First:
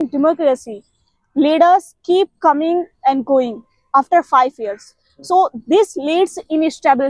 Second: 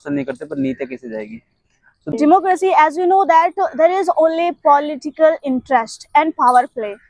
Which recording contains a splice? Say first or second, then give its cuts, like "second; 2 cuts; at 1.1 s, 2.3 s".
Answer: second; 1 cut; at 2.1 s